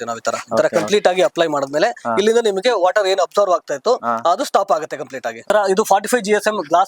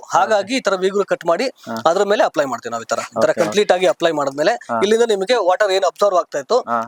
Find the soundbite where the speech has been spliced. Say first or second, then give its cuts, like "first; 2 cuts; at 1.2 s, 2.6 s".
first; 1 cut; at 5.5 s